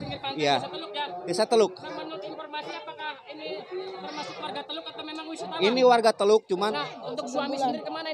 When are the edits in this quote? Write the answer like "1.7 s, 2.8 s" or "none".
6.6 s